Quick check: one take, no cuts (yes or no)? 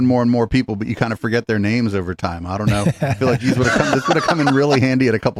yes